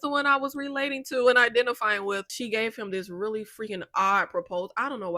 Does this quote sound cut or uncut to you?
cut